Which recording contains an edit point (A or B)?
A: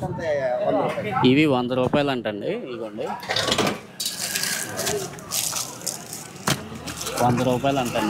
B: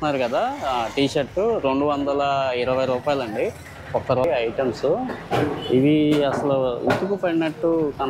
B